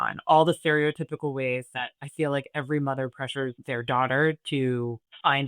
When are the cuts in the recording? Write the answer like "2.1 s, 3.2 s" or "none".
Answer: 3.6 s